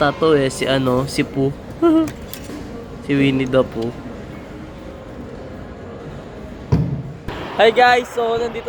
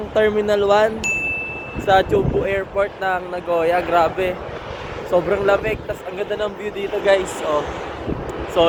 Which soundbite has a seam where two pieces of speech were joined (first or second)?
first